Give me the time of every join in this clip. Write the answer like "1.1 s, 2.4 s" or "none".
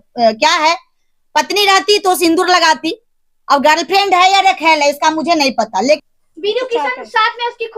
6.0 s